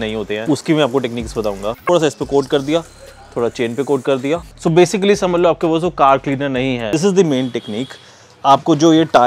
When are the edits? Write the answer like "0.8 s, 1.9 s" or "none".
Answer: 1.7 s, 4.5 s, 6.9 s